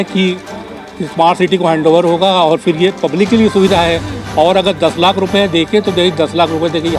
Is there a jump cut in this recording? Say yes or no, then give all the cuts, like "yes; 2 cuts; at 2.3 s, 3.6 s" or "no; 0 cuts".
no; 0 cuts